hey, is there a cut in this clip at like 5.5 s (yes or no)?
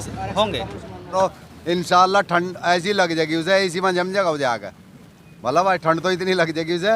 no